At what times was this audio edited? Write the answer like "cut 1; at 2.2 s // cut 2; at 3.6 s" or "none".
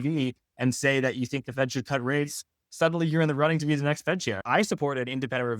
cut 1; at 4.4 s